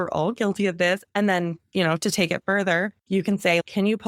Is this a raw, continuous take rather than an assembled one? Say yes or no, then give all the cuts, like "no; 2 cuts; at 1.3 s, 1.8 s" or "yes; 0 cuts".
no; 1 cut; at 3.0 s